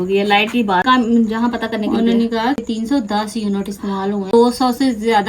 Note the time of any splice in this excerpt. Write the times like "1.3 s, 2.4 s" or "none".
0.9 s, 2.6 s, 4.3 s